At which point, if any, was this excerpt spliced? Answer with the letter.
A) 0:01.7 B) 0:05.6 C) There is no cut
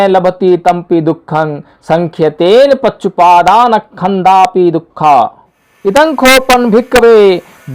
B